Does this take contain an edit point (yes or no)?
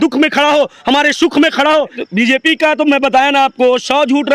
yes